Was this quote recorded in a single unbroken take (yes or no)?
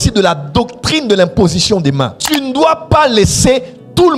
no